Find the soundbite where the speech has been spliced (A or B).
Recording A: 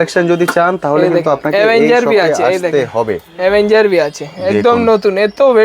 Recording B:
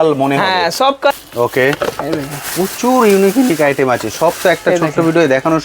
B